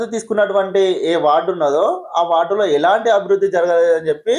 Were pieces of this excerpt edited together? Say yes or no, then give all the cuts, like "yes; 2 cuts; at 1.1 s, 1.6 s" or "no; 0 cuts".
no; 0 cuts